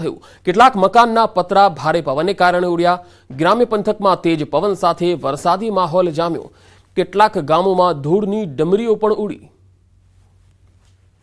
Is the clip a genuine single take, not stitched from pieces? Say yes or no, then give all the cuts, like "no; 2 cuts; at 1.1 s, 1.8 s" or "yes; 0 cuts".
yes; 0 cuts